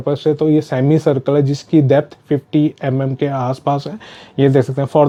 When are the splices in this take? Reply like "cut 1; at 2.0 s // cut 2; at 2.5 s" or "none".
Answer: none